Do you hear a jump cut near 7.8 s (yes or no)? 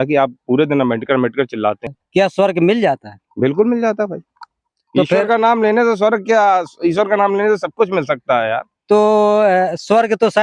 no